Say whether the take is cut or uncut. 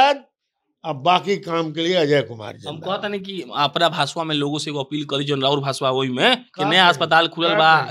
uncut